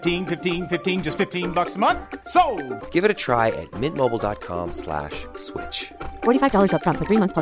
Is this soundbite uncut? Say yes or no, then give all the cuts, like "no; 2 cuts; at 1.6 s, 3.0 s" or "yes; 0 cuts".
yes; 0 cuts